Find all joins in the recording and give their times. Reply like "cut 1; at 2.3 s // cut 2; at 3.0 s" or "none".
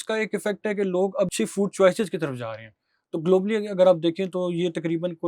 cut 1; at 1.3 s